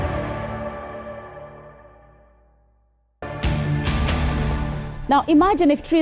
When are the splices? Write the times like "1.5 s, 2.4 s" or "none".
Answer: 1.3 s, 3.2 s